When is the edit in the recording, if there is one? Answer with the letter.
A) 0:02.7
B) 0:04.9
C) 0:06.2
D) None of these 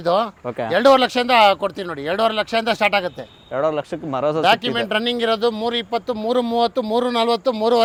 D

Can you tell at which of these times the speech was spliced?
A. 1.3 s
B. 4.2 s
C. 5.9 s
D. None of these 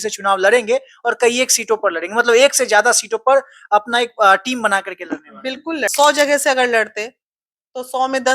C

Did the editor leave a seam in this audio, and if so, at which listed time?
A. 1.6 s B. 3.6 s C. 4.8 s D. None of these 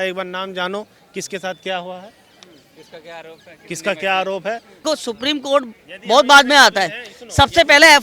C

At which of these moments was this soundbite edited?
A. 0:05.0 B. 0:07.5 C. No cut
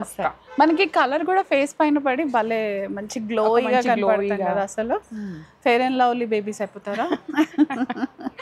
C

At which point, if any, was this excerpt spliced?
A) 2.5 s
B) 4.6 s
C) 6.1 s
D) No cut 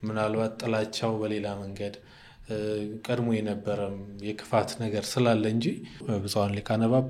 C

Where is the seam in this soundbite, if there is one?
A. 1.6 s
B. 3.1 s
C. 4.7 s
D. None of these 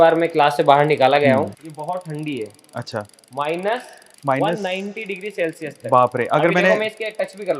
A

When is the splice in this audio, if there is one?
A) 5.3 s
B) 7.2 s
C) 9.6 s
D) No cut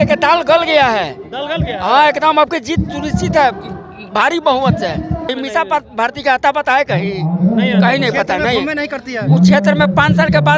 A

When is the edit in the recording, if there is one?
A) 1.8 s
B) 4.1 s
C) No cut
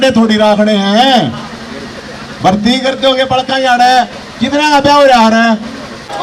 C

